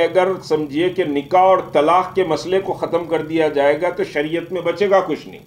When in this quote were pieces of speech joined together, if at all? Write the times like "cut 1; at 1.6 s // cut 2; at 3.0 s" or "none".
none